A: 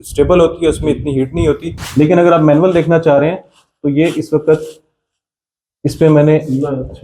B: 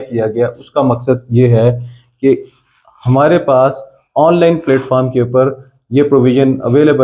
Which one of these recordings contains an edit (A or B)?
A